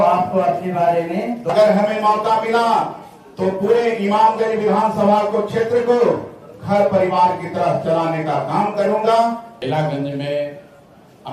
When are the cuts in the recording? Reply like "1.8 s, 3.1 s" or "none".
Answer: 1.5 s, 9.5 s